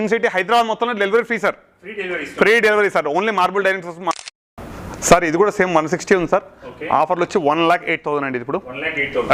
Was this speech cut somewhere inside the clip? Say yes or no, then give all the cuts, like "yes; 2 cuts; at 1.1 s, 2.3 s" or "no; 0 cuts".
no; 0 cuts